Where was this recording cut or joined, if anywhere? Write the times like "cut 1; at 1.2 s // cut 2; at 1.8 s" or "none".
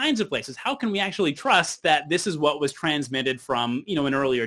none